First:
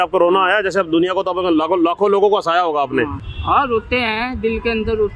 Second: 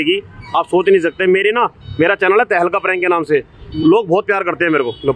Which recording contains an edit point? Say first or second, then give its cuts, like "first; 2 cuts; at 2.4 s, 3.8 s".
first; 1 cut; at 3.2 s